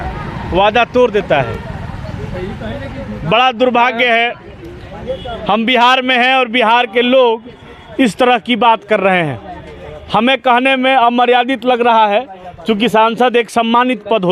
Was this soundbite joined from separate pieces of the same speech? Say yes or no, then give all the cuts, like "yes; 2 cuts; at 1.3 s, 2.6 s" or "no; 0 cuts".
no; 0 cuts